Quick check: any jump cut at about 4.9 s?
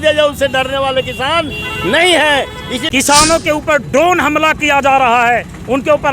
no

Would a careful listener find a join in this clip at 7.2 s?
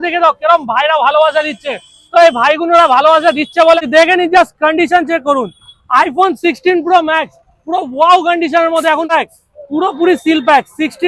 no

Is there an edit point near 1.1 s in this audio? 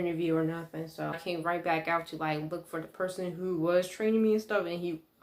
yes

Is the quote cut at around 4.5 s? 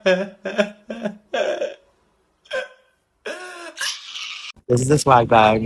yes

